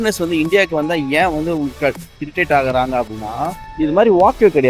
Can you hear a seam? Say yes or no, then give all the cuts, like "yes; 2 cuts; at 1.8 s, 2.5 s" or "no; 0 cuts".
yes; 1 cut; at 3.6 s